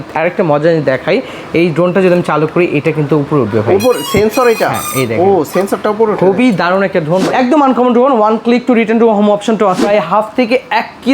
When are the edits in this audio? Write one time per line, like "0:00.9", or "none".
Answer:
0:07.3
0:09.9